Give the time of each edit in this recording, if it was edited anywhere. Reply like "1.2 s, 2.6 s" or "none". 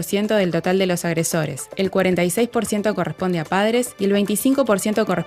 none